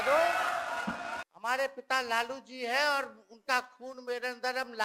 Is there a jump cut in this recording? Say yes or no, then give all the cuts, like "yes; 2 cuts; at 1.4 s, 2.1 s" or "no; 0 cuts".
yes; 1 cut; at 1.2 s